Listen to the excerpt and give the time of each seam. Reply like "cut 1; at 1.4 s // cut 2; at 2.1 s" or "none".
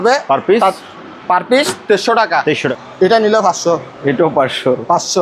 cut 1; at 2.7 s